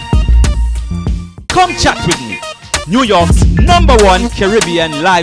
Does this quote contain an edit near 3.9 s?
no; 1 cut; at 1.2 s

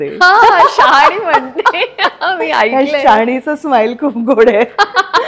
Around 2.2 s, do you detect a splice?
no; 0 cuts

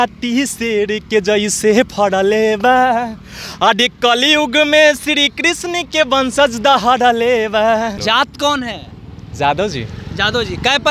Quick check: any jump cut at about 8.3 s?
yes; 1 cut; at 8.3 s

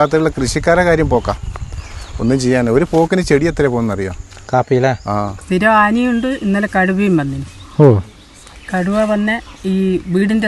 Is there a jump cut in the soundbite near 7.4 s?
no; 1 cut; at 5.4 s

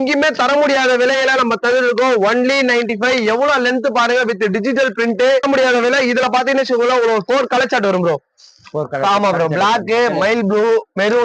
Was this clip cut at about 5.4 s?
yes; 1 cut; at 5.4 s

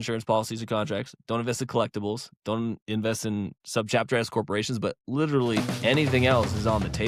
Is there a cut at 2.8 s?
no; 1 cut; at 5.7 s

